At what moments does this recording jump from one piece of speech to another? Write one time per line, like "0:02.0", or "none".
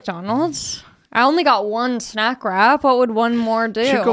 none